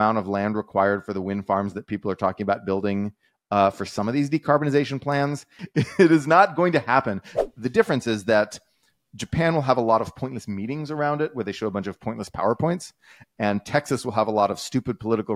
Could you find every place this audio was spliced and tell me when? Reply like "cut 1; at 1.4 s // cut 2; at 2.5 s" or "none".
cut 1; at 5.6 s // cut 2; at 7.2 s